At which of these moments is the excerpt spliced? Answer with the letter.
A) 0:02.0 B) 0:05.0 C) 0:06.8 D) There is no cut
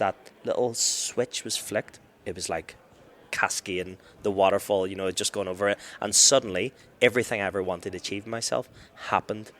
A